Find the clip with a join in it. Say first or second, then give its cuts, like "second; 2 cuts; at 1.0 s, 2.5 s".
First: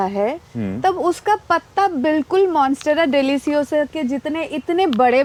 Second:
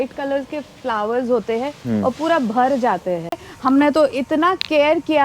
second; 1 cut; at 3.5 s